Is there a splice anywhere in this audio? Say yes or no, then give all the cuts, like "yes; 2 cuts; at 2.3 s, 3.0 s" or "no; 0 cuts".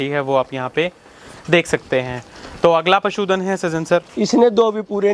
no; 0 cuts